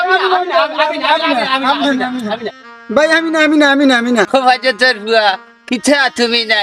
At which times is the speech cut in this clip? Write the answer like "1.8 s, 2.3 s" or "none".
none